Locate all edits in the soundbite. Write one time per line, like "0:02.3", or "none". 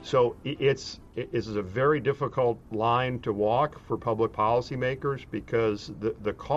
0:01.0
0:02.7